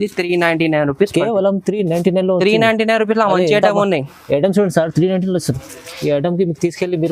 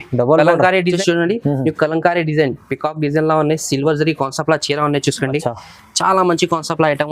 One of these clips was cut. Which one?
second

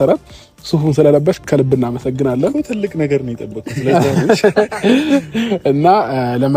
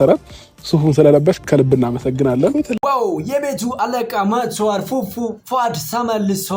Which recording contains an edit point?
first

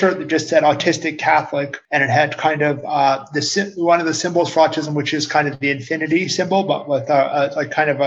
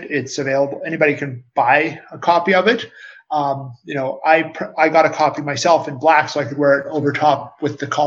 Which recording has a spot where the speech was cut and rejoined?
first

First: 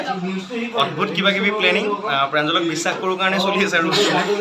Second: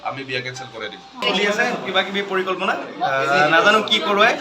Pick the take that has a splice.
second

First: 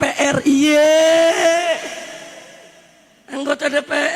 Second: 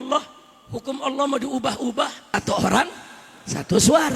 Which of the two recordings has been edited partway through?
second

